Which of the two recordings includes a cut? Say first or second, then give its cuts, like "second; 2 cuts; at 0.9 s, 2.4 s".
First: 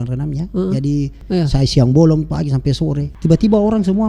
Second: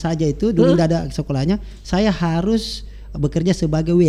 first; 2 cuts; at 1.2 s, 3.1 s